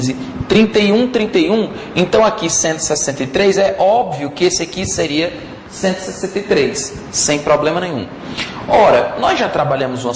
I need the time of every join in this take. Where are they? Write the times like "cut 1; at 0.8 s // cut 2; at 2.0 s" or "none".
cut 1; at 6.0 s